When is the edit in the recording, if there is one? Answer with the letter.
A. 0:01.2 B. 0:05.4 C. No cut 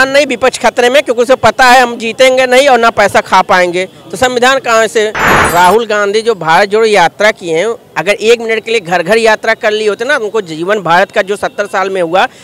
B